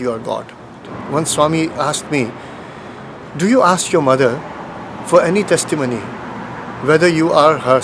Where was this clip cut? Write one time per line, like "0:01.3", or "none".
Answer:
0:00.9